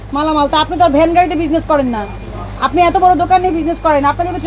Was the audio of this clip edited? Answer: no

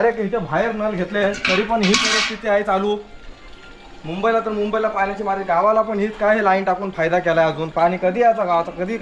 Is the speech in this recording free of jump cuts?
yes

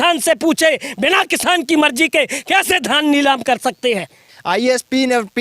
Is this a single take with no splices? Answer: no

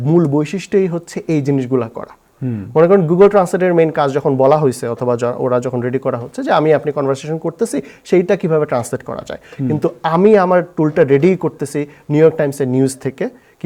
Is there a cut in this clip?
no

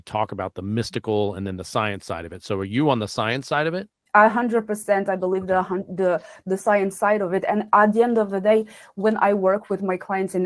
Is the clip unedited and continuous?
no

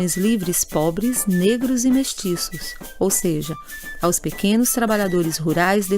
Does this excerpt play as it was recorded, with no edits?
no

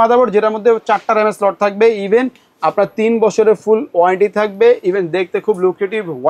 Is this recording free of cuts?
yes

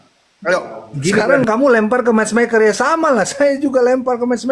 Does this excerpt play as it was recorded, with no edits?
no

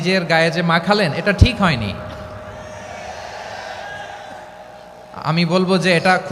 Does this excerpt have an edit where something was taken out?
no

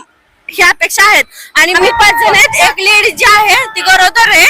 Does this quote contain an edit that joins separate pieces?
yes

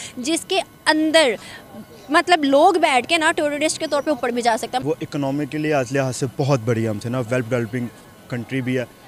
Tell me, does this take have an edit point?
yes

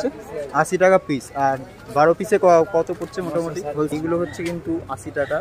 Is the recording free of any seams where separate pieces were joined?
no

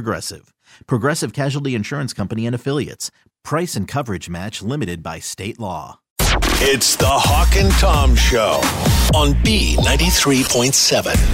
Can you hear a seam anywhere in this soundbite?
yes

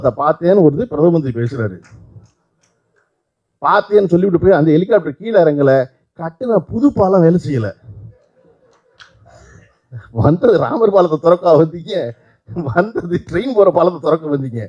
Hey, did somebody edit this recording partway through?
no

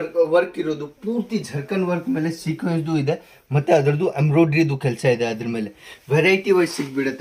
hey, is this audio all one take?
yes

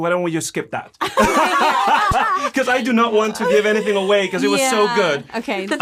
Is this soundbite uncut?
yes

